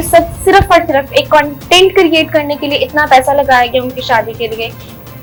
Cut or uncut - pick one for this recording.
uncut